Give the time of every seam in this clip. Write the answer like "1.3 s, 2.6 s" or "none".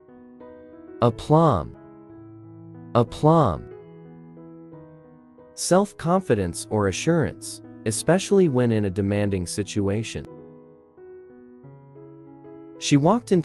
3.8 s, 5.6 s

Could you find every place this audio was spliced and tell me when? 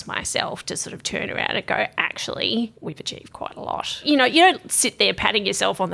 4.0 s

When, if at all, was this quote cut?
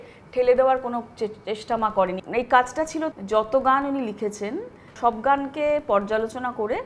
2.2 s, 3.1 s, 4.9 s

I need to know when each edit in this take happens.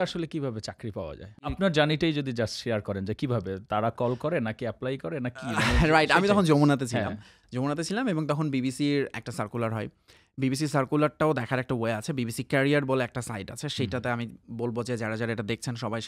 1.5 s

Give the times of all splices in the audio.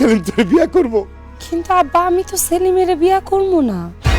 none

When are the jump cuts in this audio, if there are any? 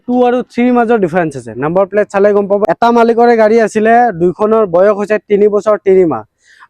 2.6 s

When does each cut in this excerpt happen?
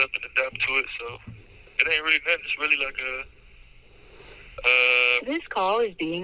none

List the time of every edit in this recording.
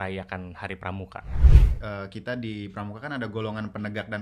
1.6 s

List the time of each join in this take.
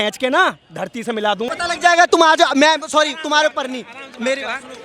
1.5 s

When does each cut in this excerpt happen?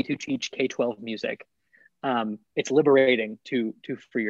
none

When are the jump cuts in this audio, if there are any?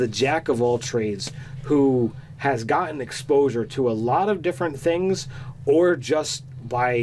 5.5 s

